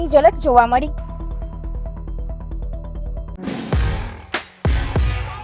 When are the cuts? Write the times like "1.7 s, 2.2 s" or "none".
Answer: 3.3 s